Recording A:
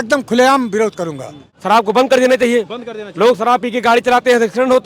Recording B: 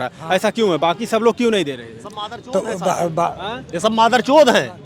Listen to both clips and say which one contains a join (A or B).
A